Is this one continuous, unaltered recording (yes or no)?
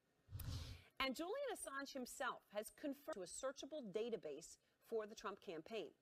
yes